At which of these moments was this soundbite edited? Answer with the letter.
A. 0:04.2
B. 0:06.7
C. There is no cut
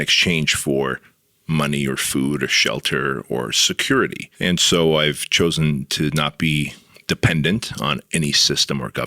A